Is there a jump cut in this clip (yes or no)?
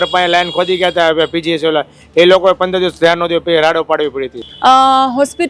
yes